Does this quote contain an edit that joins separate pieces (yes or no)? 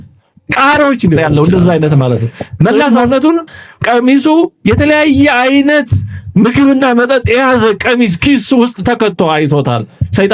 yes